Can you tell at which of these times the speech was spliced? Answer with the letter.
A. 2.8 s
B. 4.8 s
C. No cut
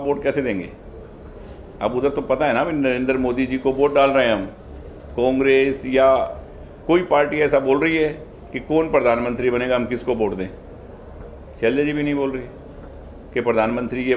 C